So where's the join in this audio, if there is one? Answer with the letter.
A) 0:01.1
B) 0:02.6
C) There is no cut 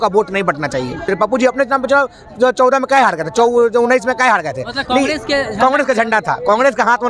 A